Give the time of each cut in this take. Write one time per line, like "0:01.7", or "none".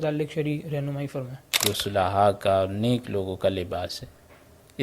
0:01.6